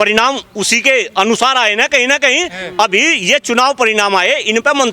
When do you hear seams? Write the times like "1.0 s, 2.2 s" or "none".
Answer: none

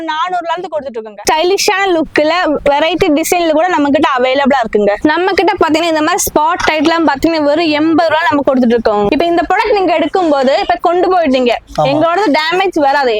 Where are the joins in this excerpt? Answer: 9.1 s

